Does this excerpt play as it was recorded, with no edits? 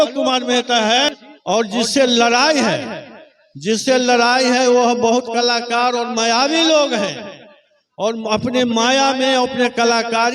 no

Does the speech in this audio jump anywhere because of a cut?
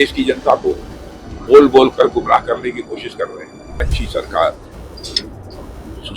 yes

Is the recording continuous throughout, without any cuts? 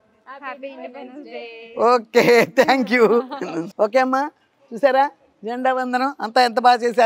yes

